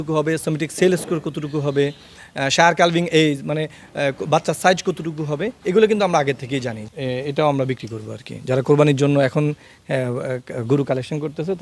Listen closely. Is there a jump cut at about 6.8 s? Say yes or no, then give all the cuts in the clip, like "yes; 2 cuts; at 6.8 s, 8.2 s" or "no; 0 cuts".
yes; 1 cut; at 6.8 s